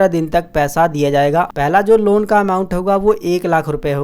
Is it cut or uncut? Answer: cut